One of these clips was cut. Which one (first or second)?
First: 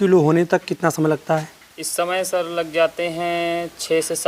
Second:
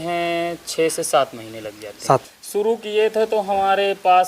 second